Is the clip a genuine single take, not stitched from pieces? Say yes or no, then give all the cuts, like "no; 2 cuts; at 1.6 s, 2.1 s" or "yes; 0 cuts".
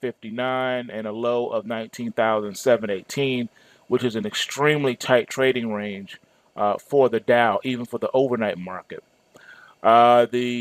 no; 1 cut; at 8.8 s